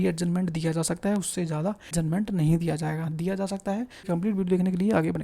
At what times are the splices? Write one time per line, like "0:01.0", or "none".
0:01.9
0:04.1